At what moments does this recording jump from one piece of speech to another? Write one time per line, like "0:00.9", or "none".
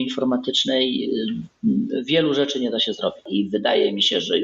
0:03.2